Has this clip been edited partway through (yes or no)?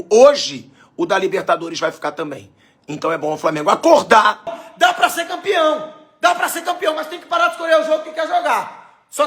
yes